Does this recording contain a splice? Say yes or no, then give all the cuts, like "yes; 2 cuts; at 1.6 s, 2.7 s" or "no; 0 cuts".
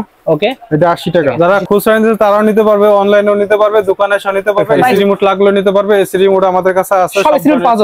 yes; 2 cuts; at 1.3 s, 5.0 s